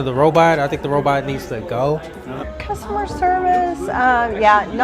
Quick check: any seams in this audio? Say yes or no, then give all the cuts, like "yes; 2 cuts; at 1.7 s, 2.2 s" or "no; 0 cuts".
yes; 1 cut; at 2.4 s